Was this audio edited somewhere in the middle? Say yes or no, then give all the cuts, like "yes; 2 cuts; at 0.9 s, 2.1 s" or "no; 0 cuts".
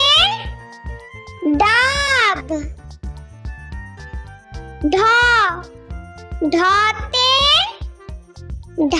no; 0 cuts